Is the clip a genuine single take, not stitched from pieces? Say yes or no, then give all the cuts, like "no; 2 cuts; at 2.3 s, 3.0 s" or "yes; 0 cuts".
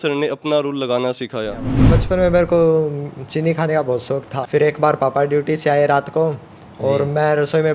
no; 2 cuts; at 2.0 s, 4.3 s